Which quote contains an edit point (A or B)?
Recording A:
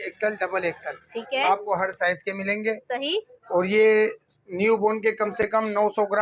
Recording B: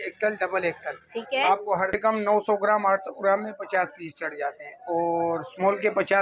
B